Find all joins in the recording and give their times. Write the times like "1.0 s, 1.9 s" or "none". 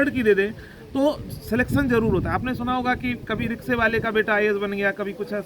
none